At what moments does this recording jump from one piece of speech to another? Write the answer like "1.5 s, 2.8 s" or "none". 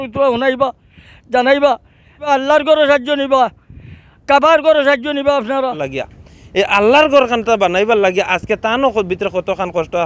2.3 s, 5.9 s